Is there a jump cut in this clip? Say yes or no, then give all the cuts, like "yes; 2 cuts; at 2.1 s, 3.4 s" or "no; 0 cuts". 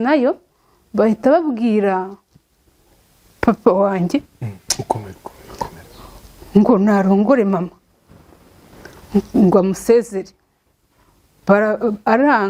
no; 0 cuts